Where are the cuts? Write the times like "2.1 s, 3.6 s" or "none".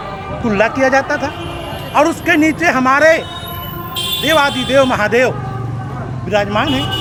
none